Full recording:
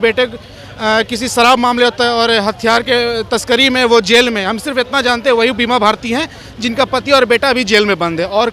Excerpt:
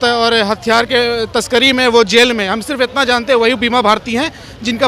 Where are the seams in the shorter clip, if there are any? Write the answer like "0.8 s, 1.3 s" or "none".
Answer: none